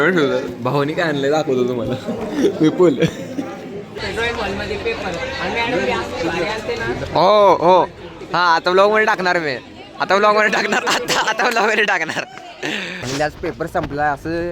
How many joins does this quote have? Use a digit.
2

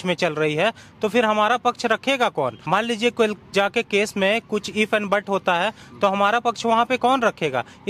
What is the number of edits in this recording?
1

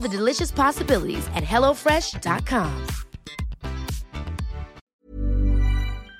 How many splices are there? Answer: 1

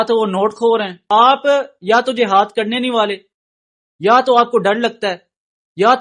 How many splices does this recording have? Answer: 1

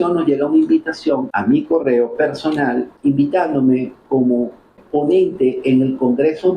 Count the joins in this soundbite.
3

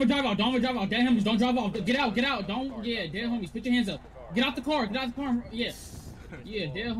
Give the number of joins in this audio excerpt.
0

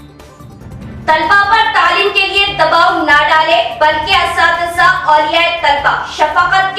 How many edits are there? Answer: 1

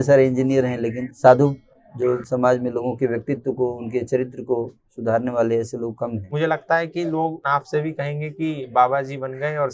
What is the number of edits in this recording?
4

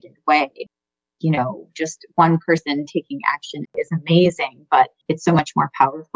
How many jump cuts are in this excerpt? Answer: 2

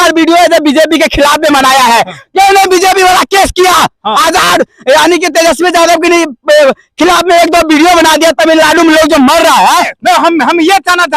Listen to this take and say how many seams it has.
0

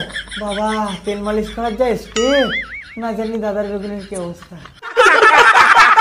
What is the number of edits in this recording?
1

